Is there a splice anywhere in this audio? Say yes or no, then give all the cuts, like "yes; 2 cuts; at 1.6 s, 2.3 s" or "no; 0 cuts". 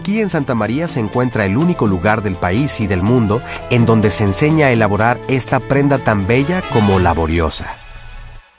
no; 0 cuts